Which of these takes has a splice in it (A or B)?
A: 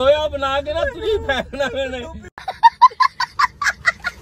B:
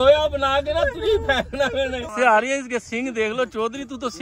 B